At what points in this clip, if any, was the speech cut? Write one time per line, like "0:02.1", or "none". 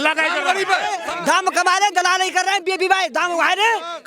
0:01.0